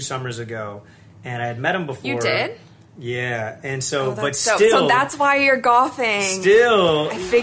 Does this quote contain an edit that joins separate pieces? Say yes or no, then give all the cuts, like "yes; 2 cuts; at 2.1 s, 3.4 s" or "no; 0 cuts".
no; 0 cuts